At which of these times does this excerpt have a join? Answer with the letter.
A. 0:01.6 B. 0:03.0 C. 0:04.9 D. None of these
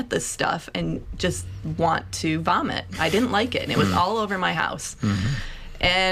D